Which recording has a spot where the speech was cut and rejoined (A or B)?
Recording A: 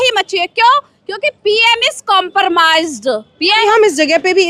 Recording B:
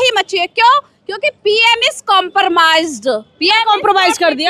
A